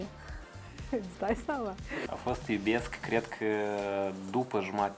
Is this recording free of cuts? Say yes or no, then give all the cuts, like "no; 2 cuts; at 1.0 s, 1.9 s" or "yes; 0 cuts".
no; 1 cut; at 1.9 s